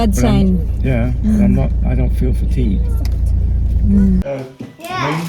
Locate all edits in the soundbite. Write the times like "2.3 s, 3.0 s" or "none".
4.2 s